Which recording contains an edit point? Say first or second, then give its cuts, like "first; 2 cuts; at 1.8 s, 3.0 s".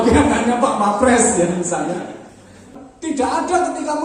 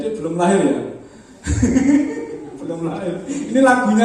first; 1 cut; at 2.7 s